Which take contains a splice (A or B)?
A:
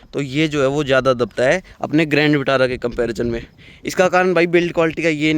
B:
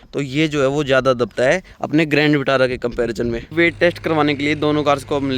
B